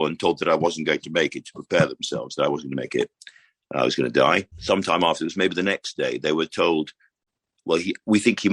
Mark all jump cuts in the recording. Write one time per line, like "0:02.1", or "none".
0:04.5

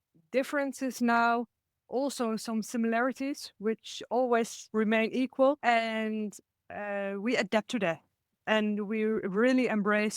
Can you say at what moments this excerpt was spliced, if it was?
0:04.6

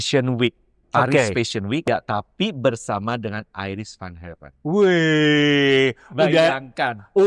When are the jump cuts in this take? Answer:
0:01.8

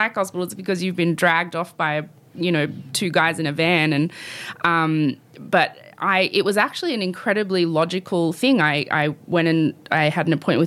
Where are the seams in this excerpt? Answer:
none

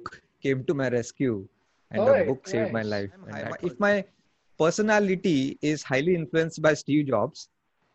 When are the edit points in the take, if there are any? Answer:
0:03.5

